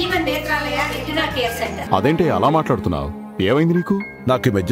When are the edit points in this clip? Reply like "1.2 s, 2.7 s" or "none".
1.8 s

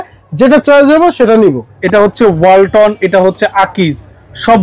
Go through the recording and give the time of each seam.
2.1 s

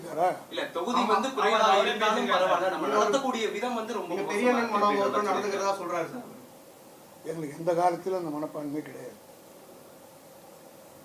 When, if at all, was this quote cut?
none

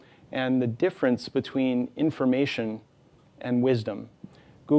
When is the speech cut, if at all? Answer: 3.6 s

